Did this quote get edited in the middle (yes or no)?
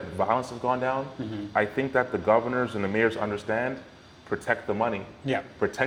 no